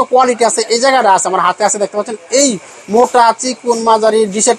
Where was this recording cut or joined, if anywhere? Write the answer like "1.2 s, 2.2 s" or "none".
none